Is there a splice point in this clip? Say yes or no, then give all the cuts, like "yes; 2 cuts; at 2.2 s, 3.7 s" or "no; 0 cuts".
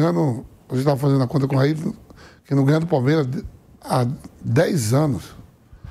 no; 0 cuts